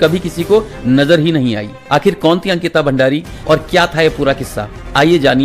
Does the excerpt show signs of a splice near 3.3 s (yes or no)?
yes